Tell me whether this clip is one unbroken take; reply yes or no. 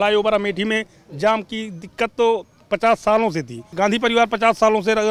no